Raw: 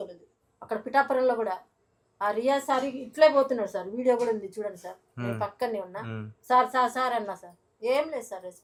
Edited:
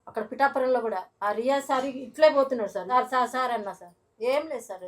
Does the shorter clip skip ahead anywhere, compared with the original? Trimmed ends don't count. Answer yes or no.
yes